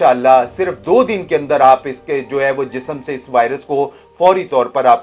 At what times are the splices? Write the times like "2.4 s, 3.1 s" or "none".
none